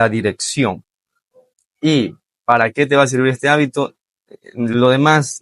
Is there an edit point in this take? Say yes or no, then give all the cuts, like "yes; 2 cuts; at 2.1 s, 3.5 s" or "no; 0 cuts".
no; 0 cuts